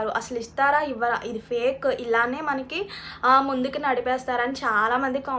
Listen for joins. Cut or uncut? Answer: uncut